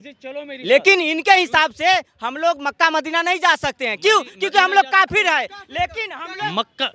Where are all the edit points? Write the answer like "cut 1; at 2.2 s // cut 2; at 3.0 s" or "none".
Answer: none